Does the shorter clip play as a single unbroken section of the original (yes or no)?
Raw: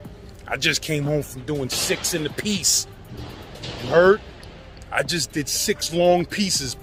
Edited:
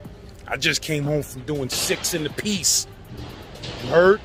yes